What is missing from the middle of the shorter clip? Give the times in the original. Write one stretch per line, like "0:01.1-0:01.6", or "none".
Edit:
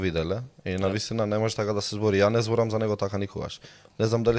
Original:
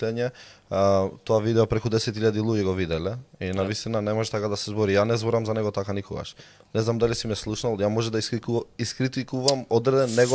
none